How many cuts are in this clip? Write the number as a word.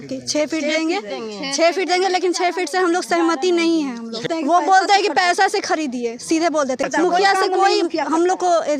two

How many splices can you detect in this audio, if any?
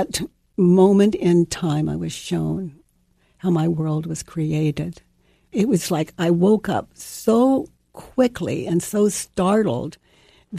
two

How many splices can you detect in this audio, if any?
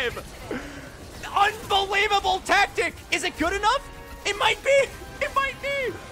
one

